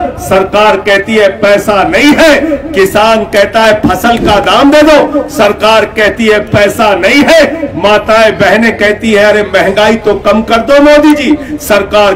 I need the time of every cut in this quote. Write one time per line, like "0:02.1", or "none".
none